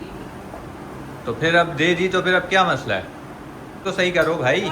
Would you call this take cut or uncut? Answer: cut